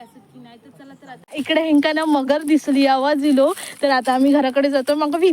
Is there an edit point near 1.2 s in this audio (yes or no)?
yes